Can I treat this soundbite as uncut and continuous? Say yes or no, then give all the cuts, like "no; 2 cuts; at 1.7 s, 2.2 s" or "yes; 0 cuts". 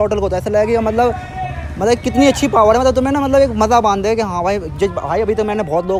yes; 0 cuts